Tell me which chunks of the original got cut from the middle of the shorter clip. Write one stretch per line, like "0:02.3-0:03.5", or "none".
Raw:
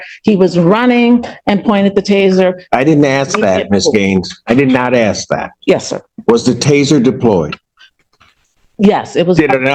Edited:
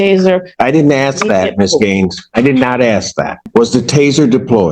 0:05.5-0:06.1